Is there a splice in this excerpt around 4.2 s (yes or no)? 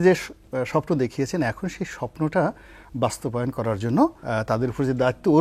yes